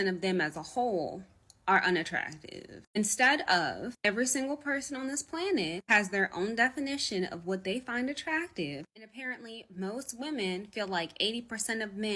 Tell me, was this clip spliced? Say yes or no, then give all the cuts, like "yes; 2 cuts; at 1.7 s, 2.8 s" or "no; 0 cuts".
no; 0 cuts